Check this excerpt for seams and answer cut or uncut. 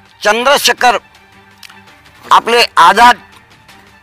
uncut